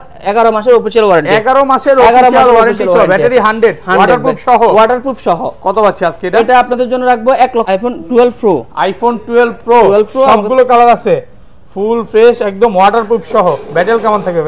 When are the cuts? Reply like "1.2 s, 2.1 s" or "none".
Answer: 7.6 s